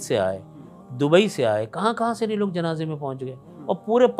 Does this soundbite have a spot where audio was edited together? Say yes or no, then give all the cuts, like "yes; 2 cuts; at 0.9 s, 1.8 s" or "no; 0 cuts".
no; 0 cuts